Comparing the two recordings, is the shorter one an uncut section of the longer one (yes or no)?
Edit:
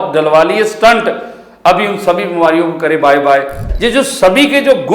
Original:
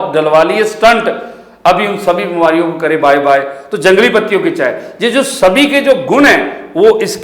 no